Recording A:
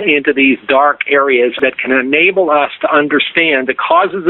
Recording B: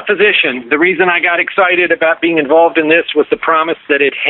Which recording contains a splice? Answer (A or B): A